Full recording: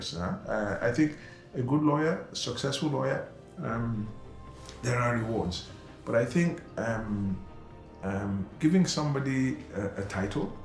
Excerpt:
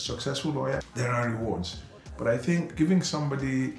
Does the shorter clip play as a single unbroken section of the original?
no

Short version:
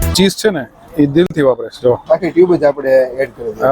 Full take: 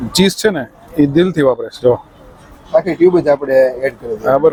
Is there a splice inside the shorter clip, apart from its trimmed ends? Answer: yes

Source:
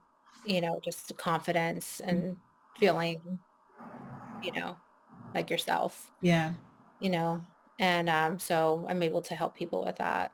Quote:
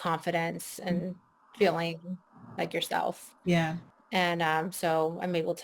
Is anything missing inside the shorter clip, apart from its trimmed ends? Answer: yes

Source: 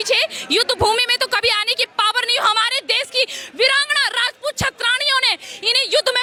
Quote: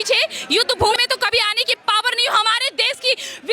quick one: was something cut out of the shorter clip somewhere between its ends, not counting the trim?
yes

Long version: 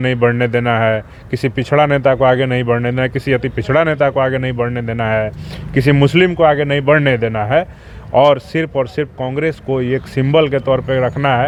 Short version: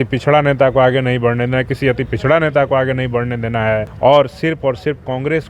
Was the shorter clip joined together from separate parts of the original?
yes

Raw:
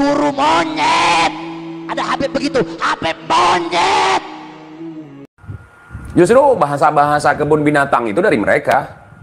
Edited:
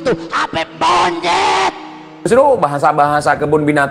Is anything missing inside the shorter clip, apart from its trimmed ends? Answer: yes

